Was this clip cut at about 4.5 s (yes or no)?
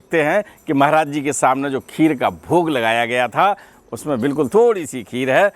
yes